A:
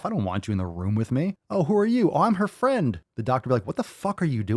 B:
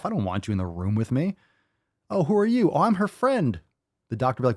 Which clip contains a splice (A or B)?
A